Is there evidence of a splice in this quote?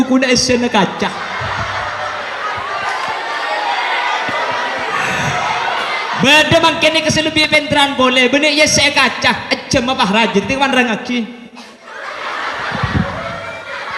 no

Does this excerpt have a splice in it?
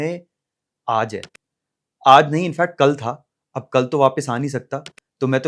no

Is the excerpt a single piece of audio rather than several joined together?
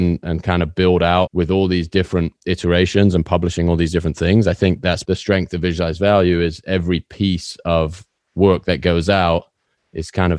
no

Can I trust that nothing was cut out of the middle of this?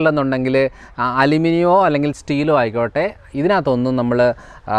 yes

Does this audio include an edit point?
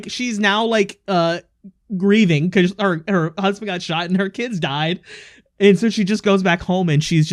no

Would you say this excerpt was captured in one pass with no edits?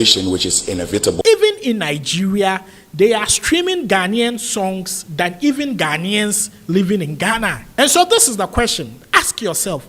no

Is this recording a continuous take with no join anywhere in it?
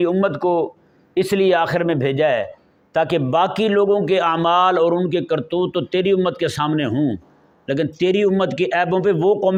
yes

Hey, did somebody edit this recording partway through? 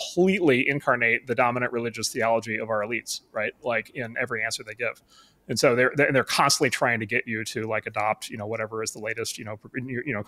no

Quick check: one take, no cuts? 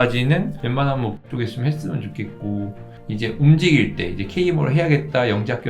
no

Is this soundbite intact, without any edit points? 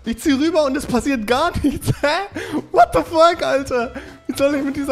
yes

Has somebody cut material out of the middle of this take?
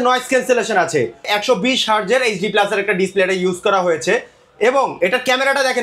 yes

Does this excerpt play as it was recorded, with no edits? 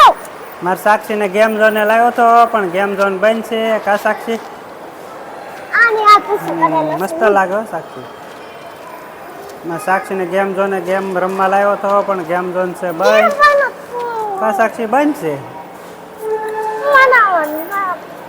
yes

